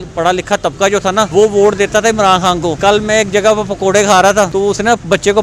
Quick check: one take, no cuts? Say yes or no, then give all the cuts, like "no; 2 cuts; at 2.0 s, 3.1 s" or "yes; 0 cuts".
no; 3 cuts; at 1.3 s, 2.8 s, 4.5 s